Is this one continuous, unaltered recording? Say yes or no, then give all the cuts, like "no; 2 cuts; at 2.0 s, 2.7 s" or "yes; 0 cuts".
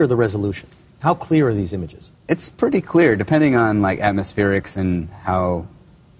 yes; 0 cuts